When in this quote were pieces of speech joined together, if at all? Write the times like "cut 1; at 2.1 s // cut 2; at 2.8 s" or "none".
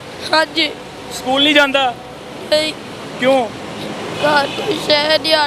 none